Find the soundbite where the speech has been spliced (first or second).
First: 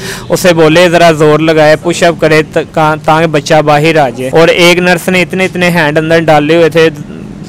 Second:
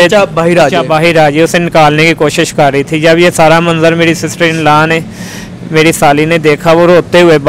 first